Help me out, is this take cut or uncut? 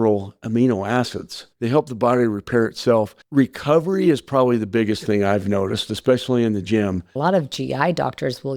cut